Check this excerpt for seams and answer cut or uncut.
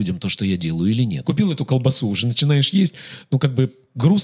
cut